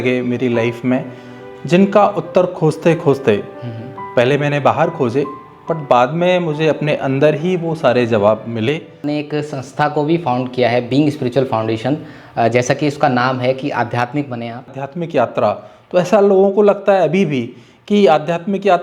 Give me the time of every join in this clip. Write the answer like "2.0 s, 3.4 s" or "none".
9.1 s, 14.8 s